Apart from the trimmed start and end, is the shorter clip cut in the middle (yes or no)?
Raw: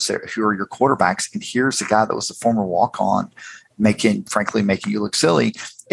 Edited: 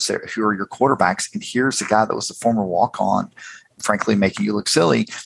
yes